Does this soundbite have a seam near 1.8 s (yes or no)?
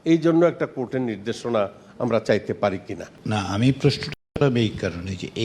no